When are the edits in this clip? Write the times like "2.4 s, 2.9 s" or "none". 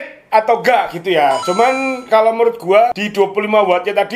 3.0 s